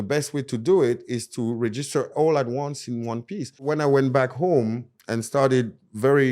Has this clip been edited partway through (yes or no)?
yes